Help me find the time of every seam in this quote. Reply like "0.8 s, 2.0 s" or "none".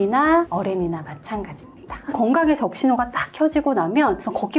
2.1 s